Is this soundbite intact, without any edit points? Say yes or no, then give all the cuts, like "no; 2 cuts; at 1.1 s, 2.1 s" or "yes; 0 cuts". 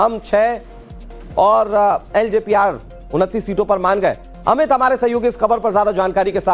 yes; 0 cuts